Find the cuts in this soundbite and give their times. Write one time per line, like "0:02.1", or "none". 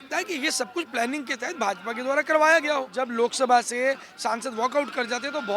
0:02.9